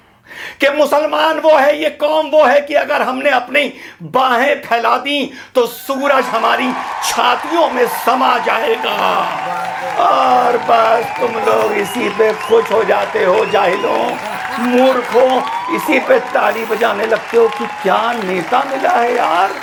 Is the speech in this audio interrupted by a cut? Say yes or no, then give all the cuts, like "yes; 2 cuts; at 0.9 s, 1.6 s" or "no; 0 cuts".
no; 0 cuts